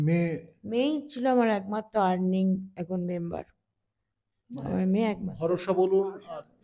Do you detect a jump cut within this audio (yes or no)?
no